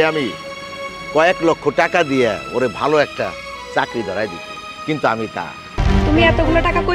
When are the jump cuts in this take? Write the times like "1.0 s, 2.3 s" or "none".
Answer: 5.8 s